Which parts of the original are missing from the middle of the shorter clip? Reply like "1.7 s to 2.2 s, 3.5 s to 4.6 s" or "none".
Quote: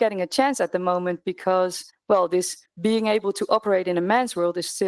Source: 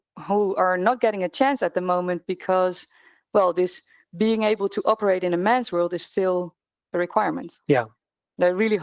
2.9 s to 3.1 s, 3.9 s to 4.0 s